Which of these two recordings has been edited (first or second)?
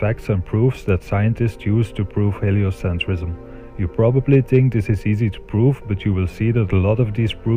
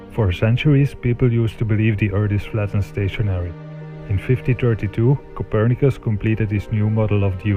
first